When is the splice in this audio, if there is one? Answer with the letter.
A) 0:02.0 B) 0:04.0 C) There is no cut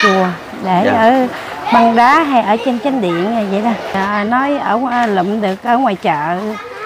B